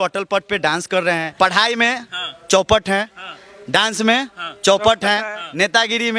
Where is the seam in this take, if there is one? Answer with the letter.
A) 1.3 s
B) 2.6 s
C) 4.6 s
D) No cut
A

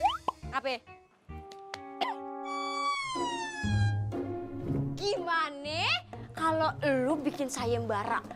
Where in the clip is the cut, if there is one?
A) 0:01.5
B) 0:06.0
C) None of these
C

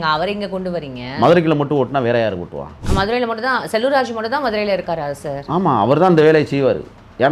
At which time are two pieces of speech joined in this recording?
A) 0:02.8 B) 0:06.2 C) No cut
A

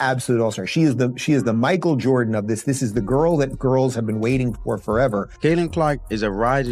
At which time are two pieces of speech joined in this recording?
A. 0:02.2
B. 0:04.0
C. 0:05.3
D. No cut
C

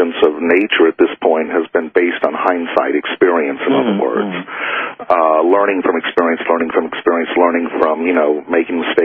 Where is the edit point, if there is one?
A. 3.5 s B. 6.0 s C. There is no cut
A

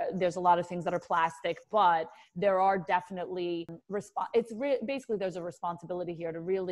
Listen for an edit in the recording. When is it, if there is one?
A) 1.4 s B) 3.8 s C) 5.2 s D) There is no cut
B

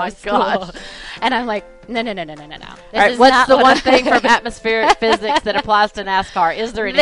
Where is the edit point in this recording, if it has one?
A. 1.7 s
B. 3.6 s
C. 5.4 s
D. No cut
D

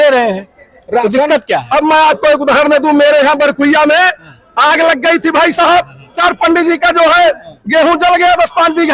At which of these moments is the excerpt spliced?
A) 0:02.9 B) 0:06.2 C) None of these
B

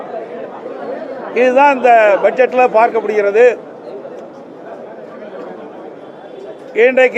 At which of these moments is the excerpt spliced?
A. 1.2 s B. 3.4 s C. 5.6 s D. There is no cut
A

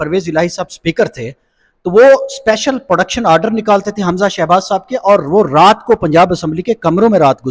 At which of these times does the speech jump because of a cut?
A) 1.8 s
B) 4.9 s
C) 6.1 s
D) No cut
D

